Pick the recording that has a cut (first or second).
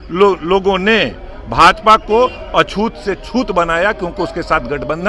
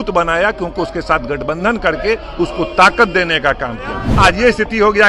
second